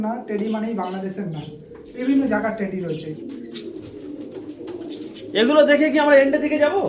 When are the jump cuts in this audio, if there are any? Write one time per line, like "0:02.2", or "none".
0:03.2